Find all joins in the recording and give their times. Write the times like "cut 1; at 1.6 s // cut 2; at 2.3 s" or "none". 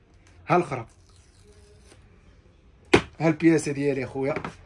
none